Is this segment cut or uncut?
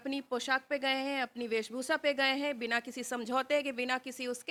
uncut